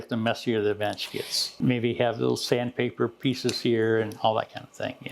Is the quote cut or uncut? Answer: cut